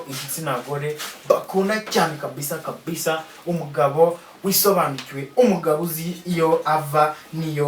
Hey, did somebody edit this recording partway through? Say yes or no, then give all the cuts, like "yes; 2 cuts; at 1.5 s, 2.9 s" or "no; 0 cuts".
no; 0 cuts